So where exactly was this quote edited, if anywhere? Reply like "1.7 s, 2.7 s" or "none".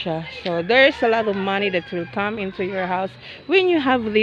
none